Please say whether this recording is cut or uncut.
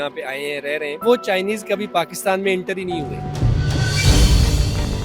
cut